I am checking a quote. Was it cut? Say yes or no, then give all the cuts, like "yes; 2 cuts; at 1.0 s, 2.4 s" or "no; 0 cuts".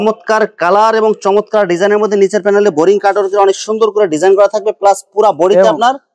no; 0 cuts